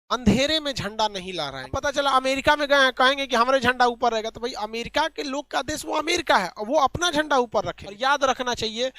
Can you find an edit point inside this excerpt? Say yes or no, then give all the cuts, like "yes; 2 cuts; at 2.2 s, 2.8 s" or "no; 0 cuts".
yes; 2 cuts; at 1.8 s, 7.8 s